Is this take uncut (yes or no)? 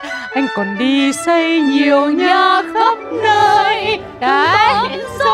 yes